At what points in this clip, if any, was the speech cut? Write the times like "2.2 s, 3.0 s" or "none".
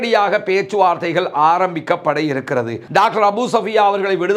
2.8 s